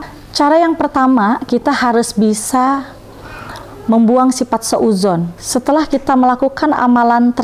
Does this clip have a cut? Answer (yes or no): yes